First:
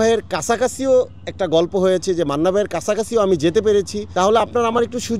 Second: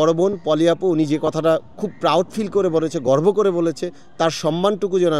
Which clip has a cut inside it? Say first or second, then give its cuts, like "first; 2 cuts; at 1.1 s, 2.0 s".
first; 1 cut; at 4.0 s